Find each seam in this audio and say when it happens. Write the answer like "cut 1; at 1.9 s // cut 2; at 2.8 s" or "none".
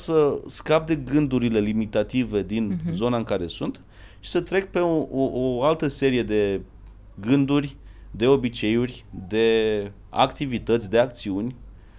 none